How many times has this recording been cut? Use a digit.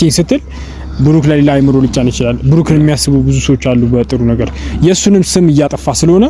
0